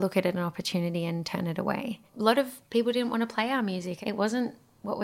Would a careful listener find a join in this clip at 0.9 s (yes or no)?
no